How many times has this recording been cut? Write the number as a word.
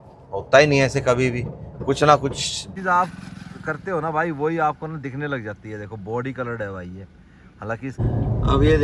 two